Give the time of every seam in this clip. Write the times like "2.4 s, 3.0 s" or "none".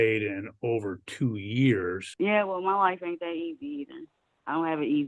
2.1 s